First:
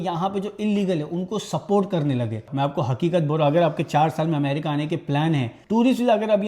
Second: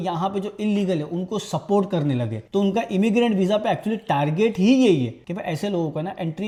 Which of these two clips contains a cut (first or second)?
first